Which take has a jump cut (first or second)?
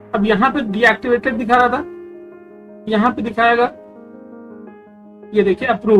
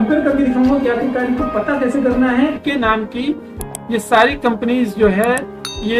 second